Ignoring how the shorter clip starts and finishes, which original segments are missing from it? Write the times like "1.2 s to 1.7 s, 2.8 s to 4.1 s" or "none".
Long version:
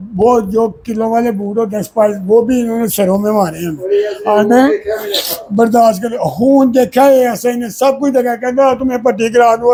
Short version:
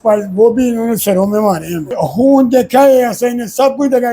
3.8 s to 6.1 s

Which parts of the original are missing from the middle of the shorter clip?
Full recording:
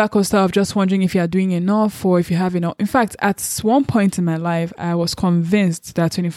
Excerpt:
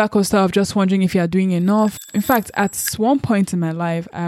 2.0 s to 2.6 s

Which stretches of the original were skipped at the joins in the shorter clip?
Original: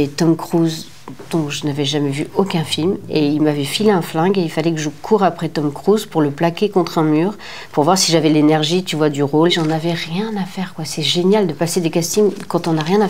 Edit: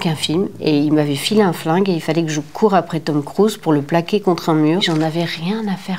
7.4 s to 9.6 s

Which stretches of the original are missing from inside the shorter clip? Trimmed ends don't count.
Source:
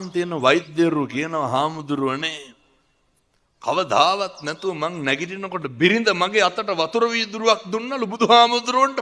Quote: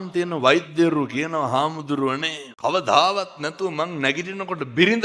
2.4 s to 3.4 s

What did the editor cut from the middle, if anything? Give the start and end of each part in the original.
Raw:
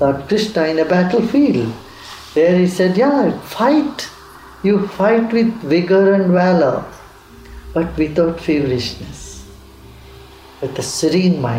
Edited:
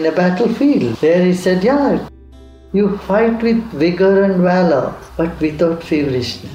1.7 s to 2.3 s, 3.5 s to 4.0 s, 6.9 s to 7.6 s

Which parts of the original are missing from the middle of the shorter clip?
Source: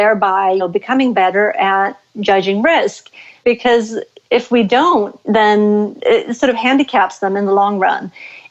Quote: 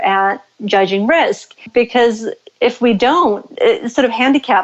3.1 s to 3.2 s, 5.2 s to 5.9 s

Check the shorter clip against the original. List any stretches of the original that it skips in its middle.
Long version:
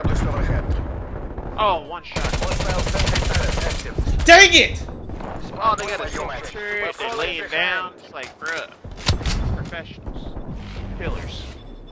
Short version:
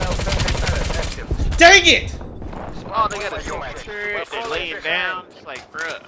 none

